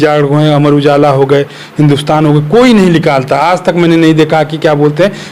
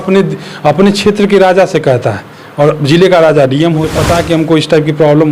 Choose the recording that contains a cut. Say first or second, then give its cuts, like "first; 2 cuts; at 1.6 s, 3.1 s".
second; 1 cut; at 4.0 s